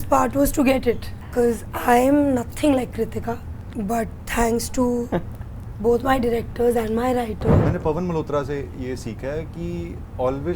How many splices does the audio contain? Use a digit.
3